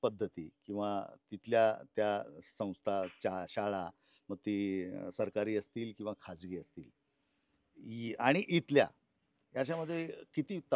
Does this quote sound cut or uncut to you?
uncut